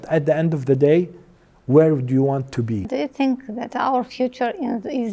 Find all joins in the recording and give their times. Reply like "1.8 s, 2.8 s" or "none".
2.9 s